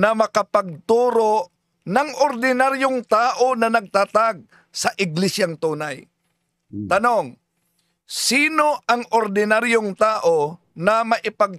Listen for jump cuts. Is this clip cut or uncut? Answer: uncut